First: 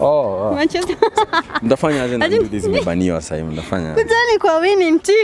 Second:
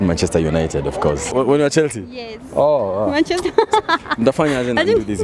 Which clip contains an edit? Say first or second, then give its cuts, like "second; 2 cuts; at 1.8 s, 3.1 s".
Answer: second; 1 cut; at 1.3 s